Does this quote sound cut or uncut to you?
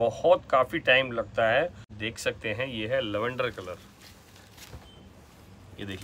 cut